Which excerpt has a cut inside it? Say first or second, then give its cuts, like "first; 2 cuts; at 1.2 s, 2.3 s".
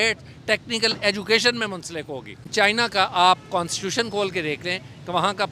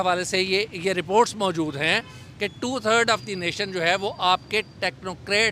first; 1 cut; at 2.4 s